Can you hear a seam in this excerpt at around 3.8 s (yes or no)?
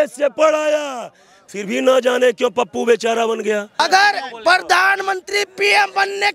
yes